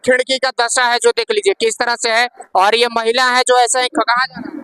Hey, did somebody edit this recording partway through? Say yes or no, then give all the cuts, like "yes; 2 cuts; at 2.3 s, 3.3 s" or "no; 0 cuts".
no; 0 cuts